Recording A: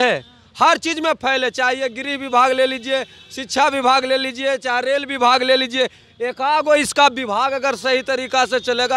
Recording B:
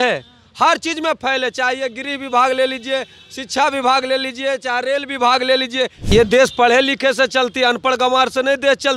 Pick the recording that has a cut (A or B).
B